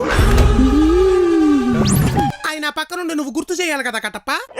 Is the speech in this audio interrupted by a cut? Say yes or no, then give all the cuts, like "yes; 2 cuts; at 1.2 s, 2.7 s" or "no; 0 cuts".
yes; 1 cut; at 2.3 s